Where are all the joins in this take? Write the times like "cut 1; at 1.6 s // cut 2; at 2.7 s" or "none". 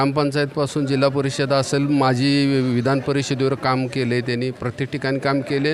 none